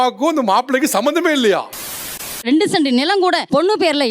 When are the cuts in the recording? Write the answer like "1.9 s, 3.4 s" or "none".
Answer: 1.9 s